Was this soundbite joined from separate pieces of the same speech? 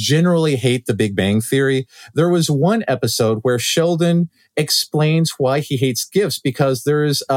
no; 0 cuts

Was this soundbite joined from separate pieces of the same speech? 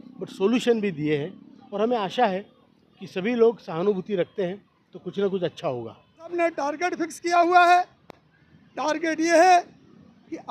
yes; 1 cut; at 6.3 s

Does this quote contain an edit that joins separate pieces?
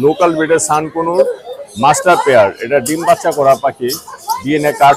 no; 0 cuts

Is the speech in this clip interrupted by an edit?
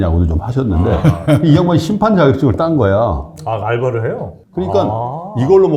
yes; 2 cuts; at 1.0 s, 4.3 s

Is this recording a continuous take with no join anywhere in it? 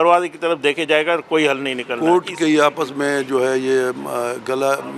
no; 1 cut; at 1.9 s

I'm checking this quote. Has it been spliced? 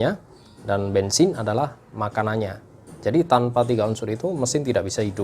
no; 0 cuts

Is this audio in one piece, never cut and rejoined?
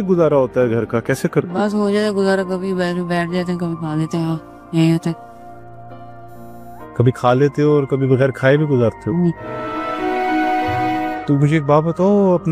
yes; 0 cuts

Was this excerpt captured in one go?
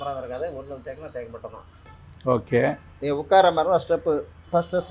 no; 1 cut; at 1.8 s

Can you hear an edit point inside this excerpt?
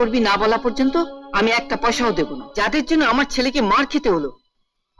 yes; 1 cut; at 2.4 s

